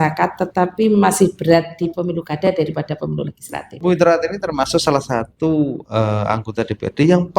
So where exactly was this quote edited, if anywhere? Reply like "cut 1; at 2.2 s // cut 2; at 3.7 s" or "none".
cut 1; at 3.8 s